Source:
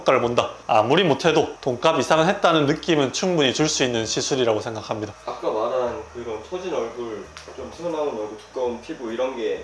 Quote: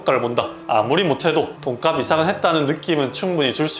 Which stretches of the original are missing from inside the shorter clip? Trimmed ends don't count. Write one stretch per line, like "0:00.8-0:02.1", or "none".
none